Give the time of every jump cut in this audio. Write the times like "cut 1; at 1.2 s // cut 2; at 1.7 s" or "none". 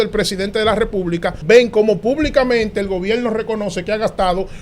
cut 1; at 1.4 s